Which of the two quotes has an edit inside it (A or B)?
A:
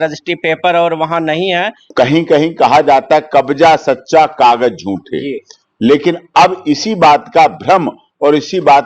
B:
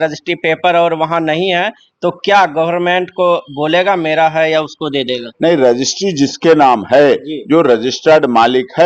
A